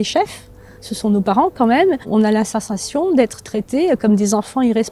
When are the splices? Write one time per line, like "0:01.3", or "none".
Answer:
0:02.1